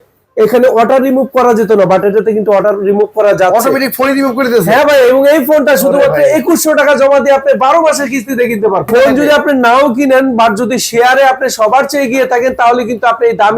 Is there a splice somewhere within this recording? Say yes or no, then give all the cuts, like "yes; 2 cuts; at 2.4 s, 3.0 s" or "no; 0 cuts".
yes; 1 cut; at 8.9 s